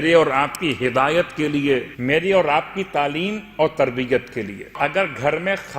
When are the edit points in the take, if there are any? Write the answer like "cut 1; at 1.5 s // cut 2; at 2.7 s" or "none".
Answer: cut 1; at 1.9 s // cut 2; at 4.8 s

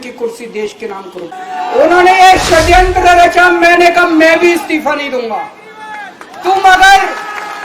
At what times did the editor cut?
cut 1; at 1.3 s

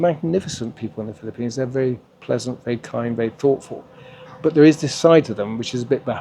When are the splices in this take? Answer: none

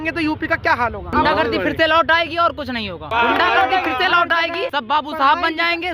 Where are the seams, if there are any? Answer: cut 1; at 1.1 s // cut 2; at 3.0 s // cut 3; at 4.7 s

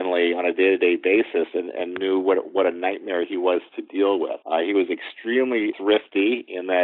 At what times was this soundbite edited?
cut 1; at 4.4 s // cut 2; at 5.7 s

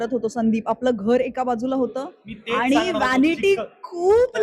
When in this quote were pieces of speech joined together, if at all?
none

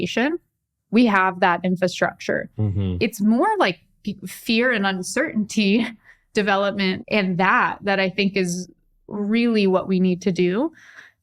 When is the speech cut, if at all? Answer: cut 1; at 7.0 s

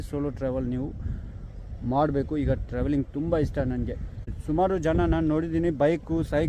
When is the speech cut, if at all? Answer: cut 1; at 4.3 s

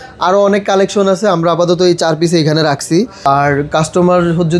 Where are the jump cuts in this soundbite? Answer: cut 1; at 3.2 s

